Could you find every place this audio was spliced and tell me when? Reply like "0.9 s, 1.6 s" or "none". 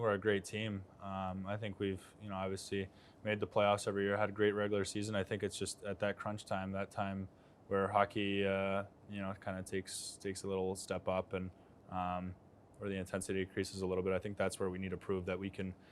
none